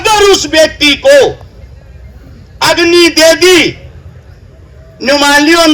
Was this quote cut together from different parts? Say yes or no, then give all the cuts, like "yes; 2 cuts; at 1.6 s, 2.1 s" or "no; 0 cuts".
no; 0 cuts